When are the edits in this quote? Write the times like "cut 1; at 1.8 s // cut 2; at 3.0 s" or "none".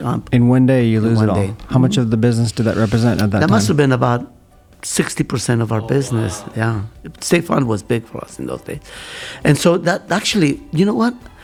none